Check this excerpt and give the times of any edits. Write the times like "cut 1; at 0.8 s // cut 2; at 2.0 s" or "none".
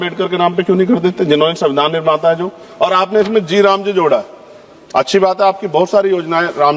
none